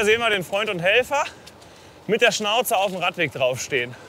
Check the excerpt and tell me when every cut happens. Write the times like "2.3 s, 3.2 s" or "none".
none